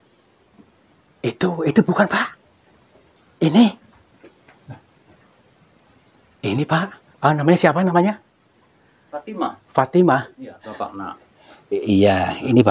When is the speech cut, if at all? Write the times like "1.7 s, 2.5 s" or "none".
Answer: 10.7 s